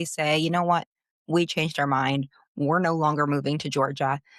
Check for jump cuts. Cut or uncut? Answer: uncut